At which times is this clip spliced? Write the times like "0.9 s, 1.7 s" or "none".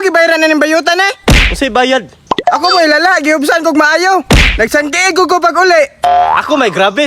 2.2 s

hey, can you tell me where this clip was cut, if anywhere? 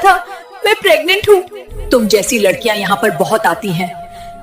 1.6 s

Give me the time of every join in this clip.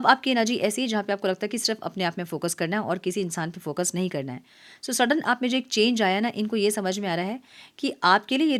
none

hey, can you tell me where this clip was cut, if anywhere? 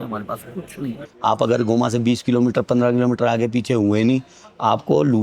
1.0 s

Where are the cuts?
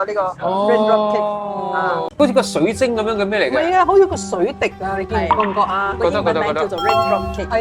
2.2 s

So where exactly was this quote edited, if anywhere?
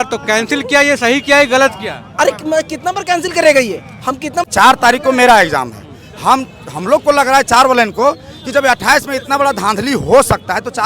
4.4 s

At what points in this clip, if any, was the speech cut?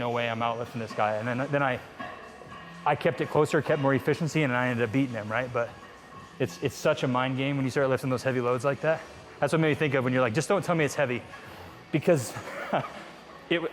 none

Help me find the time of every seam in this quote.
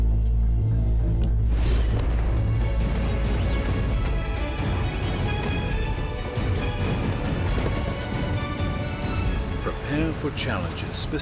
none

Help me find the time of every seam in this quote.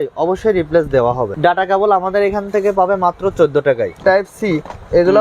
1.3 s, 4.0 s

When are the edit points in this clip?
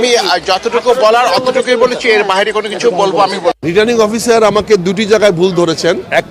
3.6 s

